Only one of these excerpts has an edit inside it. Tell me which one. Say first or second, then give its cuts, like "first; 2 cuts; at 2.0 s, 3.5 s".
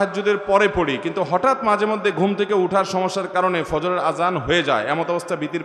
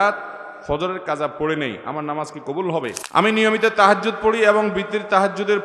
second; 1 cut; at 3.0 s